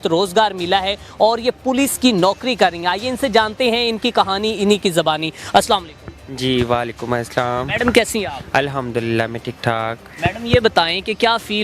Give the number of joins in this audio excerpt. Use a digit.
0